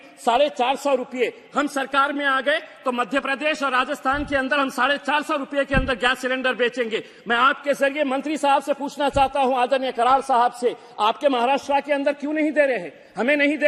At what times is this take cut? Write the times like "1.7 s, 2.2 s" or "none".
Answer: none